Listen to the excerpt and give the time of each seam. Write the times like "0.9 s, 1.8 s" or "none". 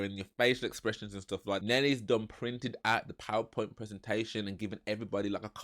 1.6 s